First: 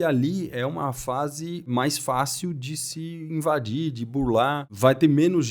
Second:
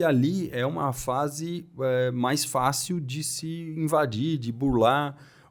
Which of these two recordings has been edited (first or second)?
first